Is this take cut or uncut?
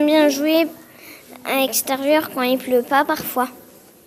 uncut